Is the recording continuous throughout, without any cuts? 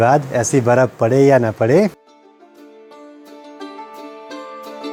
yes; 0 cuts

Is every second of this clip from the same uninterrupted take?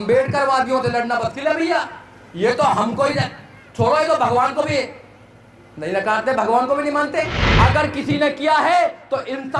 no; 1 cut; at 7.4 s

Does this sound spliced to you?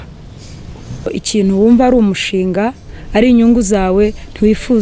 yes; 1 cut; at 1.2 s

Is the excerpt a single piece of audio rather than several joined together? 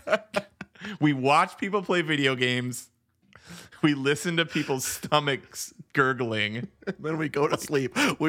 no; 1 cut; at 6.7 s

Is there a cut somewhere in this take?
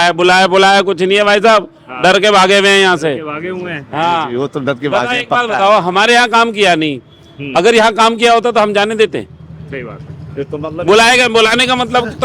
no; 0 cuts

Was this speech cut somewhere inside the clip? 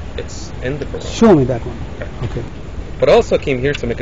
yes; 1 cut; at 2.6 s

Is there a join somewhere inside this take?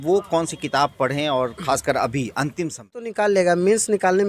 yes; 1 cut; at 3.1 s

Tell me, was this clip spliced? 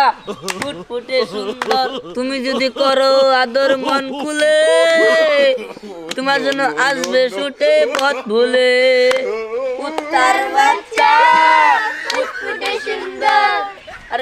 no; 0 cuts

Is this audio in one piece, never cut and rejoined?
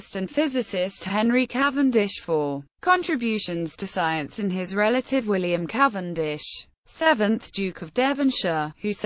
yes; 0 cuts

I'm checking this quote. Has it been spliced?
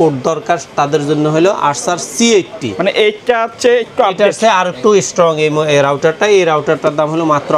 no; 0 cuts

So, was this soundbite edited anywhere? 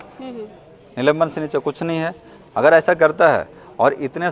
no; 0 cuts

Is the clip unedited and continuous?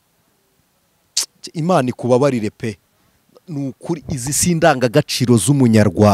yes; 0 cuts

